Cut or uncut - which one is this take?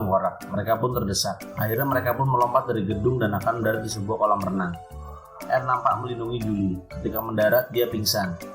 cut